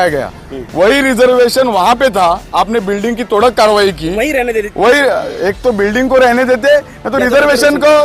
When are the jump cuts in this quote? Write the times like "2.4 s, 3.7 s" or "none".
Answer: none